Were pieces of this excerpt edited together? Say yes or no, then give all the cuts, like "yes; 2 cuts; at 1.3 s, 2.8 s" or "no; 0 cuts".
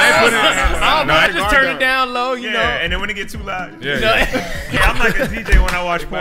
yes; 2 cuts; at 1.3 s, 4.8 s